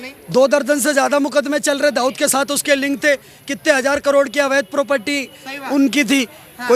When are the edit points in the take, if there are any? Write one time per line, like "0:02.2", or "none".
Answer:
none